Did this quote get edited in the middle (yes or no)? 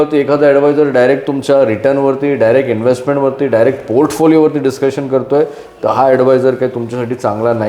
no